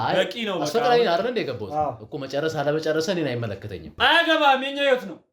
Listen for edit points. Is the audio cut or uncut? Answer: cut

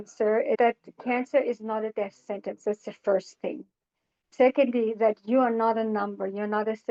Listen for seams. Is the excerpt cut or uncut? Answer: uncut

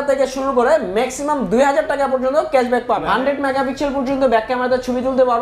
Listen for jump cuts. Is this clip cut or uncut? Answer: cut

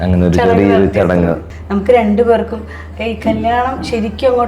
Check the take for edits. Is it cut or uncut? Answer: cut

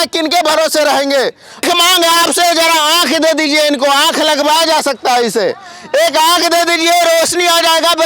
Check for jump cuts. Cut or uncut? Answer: cut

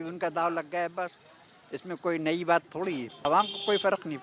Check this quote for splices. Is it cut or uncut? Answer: cut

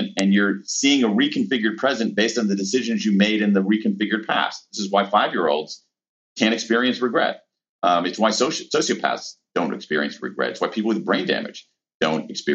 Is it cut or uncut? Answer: cut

